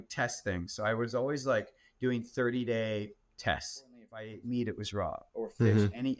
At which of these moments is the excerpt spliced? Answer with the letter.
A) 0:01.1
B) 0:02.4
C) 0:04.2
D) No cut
C